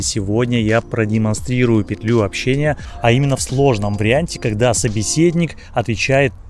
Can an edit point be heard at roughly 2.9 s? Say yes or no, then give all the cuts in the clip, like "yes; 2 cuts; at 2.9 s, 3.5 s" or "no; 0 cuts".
yes; 1 cut; at 2.9 s